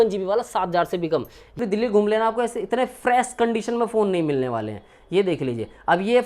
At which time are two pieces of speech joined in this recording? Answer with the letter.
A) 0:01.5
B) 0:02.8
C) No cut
A